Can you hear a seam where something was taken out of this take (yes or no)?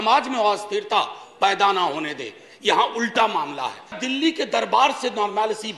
yes